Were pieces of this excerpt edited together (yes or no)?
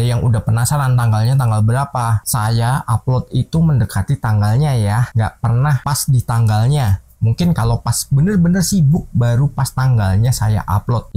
no